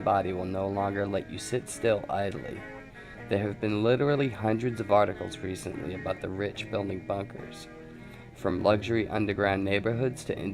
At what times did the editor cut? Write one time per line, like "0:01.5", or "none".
0:08.1